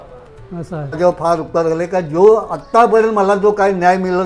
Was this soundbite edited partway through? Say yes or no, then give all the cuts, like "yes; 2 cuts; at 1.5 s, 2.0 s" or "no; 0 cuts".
yes; 1 cut; at 1.0 s